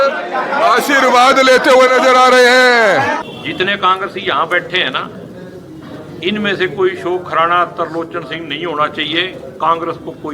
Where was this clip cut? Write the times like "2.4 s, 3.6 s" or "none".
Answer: 3.2 s